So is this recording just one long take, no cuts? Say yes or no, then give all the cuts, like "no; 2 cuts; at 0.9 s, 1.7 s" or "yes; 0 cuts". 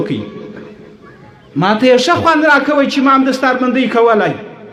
yes; 0 cuts